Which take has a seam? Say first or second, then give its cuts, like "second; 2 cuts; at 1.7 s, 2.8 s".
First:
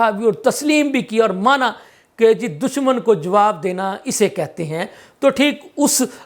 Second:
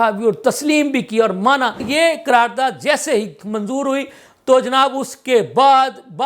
second; 1 cut; at 1.8 s